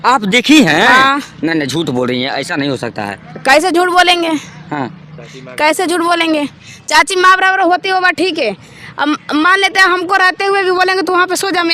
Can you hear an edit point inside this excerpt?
no; 0 cuts

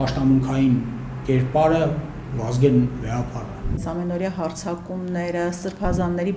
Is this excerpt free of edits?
no; 1 cut; at 3.8 s

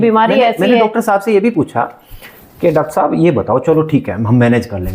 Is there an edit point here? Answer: no; 0 cuts

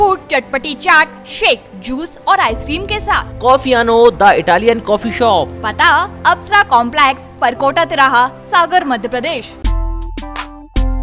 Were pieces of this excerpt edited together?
yes; 1 cut; at 9.5 s

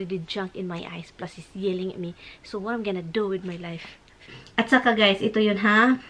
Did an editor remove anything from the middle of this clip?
yes; 1 cut; at 4.4 s

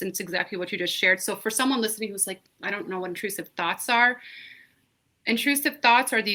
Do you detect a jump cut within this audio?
no; 0 cuts

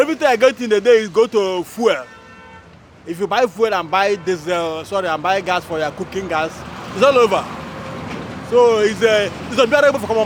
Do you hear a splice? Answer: no; 0 cuts

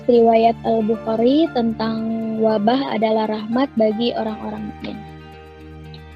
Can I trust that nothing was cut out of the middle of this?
no; 1 cut; at 5.0 s

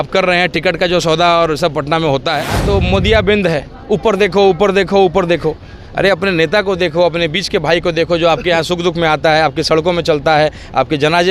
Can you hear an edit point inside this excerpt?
yes; 1 cut; at 2.6 s

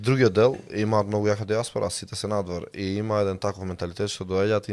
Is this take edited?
no; 0 cuts

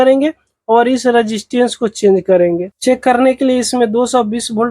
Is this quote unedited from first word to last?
no; 1 cut; at 2.7 s

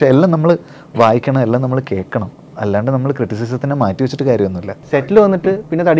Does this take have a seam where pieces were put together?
yes; 1 cut; at 5.1 s

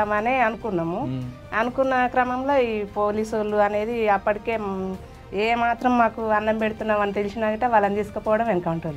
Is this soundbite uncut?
yes; 0 cuts

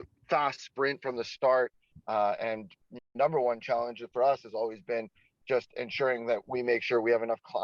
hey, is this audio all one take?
no; 1 cut; at 3.1 s

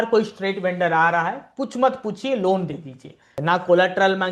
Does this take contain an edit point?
yes; 1 cut; at 3.3 s

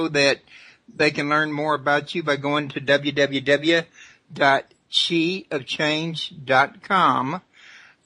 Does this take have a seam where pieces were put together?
yes; 1 cut; at 3.6 s

